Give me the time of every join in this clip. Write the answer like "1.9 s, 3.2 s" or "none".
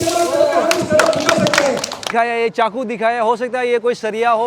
2.1 s